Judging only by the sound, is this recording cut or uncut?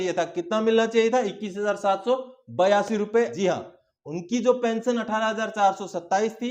cut